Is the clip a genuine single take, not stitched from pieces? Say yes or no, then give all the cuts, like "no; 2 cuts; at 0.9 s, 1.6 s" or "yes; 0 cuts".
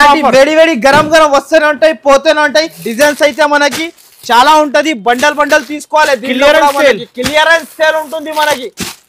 no; 1 cut; at 2.8 s